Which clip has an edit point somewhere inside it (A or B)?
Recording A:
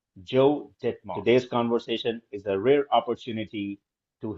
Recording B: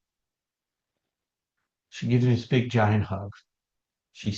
A